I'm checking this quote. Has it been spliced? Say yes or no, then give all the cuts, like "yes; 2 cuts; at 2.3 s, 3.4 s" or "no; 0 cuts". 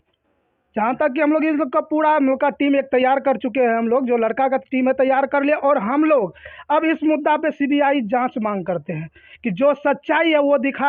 no; 0 cuts